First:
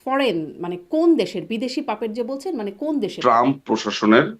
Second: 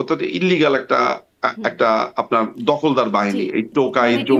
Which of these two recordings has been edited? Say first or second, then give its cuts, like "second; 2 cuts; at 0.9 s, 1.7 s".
first; 1 cut; at 3.1 s